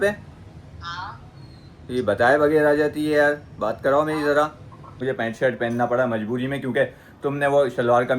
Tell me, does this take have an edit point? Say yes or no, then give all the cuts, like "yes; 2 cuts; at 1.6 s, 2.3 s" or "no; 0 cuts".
yes; 1 cut; at 5.0 s